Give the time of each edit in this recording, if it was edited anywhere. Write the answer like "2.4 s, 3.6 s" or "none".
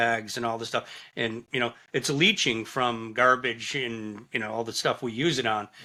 none